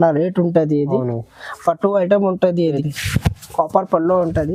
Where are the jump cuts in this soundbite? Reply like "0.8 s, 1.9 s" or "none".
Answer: 2.8 s